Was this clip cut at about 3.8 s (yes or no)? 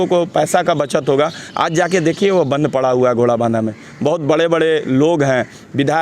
no